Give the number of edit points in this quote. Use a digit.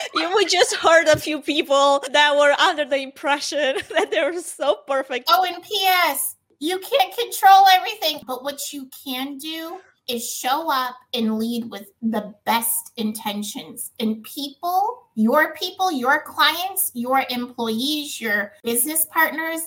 2